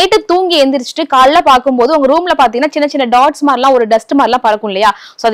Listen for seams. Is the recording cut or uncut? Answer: uncut